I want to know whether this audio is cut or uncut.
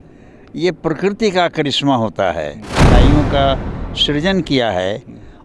cut